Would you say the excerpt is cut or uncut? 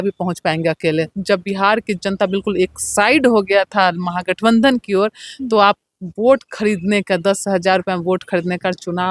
cut